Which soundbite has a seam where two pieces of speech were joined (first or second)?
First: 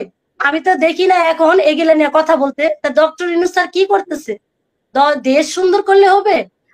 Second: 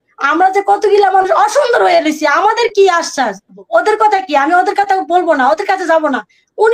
second